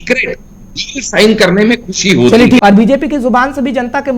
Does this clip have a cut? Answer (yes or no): yes